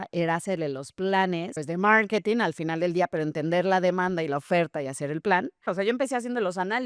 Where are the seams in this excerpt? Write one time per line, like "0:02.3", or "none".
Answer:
0:01.6
0:05.7